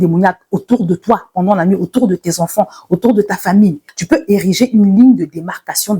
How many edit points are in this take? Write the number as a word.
one